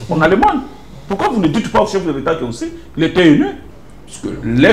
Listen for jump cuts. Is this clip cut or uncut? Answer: cut